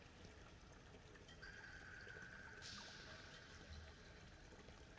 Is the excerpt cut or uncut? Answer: uncut